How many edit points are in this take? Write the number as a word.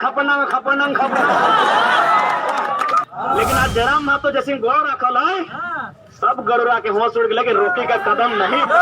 one